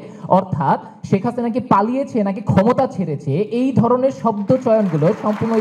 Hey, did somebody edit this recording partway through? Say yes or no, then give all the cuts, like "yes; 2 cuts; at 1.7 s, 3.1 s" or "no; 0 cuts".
no; 0 cuts